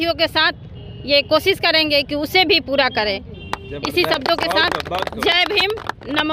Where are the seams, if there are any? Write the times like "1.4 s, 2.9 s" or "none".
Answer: none

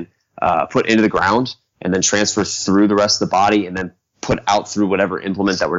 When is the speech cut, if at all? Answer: none

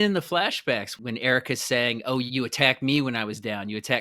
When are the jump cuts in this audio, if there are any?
0.9 s, 2.3 s

